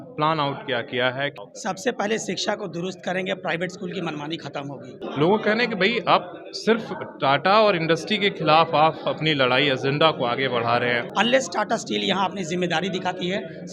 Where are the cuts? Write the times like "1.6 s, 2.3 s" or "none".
1.4 s, 5.0 s, 11.0 s